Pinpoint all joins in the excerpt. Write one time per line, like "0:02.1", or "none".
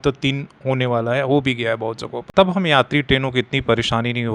0:02.1